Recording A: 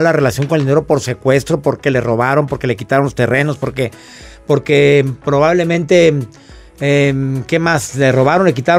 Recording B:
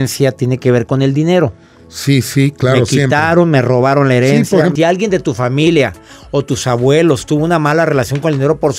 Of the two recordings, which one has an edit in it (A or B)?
B